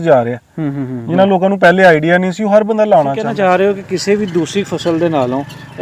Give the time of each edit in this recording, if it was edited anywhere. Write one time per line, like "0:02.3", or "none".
0:03.2